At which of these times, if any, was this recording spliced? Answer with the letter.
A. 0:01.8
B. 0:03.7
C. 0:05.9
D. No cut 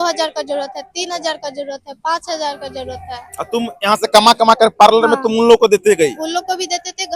D